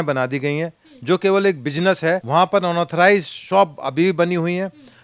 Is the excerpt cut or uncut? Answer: cut